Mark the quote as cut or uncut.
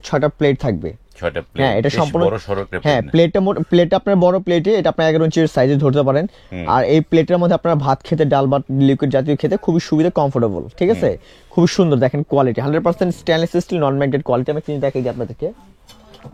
uncut